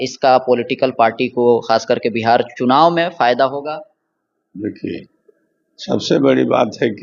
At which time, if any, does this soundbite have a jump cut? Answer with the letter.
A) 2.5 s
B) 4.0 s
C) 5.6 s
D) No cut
D